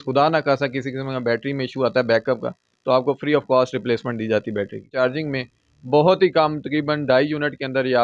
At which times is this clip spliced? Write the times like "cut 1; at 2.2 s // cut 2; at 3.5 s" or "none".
cut 1; at 4.8 s